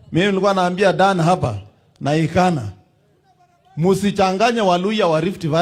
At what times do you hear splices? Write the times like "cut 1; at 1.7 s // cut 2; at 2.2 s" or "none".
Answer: none